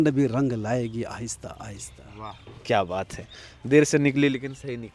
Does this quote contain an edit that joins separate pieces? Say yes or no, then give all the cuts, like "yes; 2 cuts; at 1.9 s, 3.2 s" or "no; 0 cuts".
no; 0 cuts